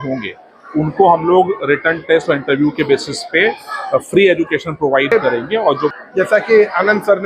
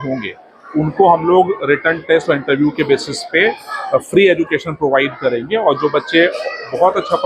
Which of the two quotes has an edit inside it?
first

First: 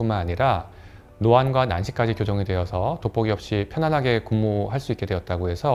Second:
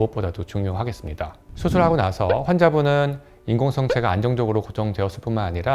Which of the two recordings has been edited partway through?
second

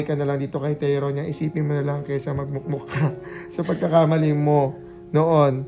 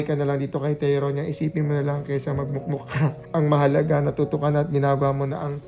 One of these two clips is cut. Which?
second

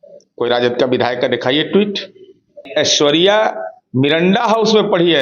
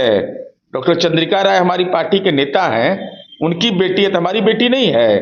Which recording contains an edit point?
first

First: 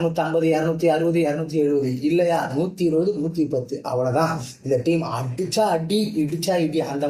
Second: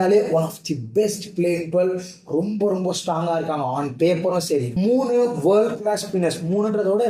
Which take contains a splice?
second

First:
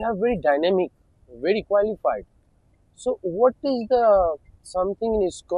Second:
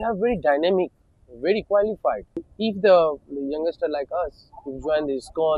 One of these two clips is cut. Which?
second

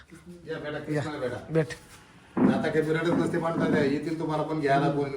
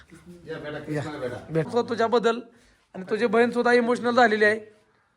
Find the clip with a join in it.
second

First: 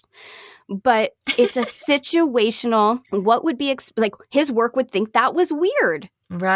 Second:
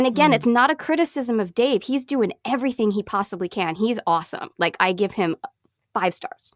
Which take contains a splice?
first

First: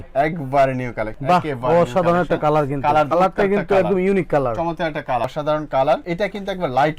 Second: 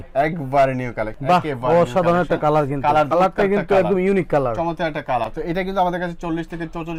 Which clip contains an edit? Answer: first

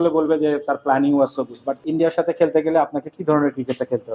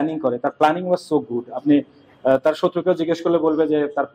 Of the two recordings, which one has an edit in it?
first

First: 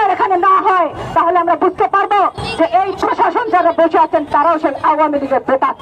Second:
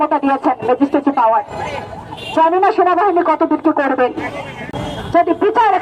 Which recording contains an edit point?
second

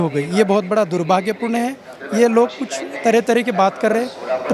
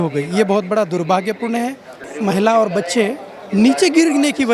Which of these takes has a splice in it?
second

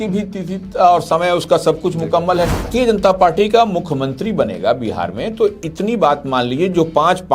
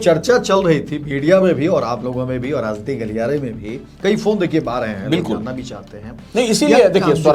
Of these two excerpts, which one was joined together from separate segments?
first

